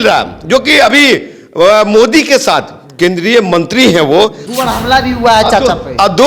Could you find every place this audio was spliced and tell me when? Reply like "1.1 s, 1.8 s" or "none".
4.4 s